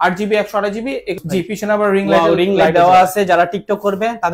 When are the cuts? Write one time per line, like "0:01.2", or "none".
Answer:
0:01.2